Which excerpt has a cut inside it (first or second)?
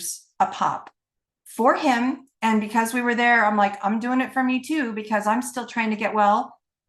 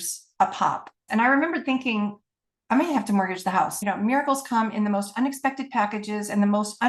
second